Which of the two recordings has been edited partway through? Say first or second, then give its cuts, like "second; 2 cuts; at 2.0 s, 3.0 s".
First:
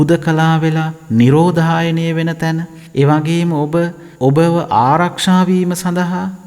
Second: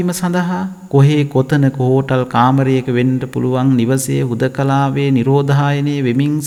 first; 2 cuts; at 2.8 s, 4.0 s